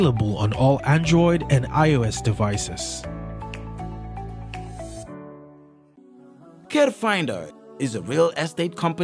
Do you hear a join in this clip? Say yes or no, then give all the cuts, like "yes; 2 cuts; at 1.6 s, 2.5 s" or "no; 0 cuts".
yes; 1 cut; at 6.0 s